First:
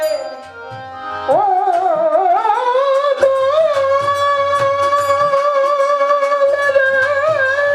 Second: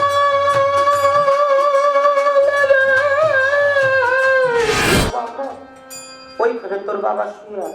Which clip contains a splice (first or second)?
second